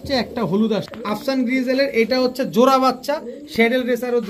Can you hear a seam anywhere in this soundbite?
yes; 1 cut; at 0.9 s

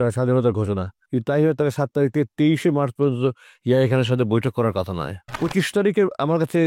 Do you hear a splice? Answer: yes; 2 cuts; at 0.9 s, 5.2 s

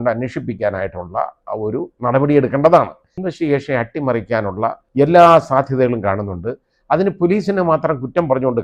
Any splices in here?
yes; 3 cuts; at 1.4 s, 3.2 s, 4.8 s

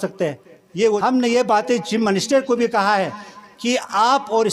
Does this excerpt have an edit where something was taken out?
yes; 1 cut; at 1.0 s

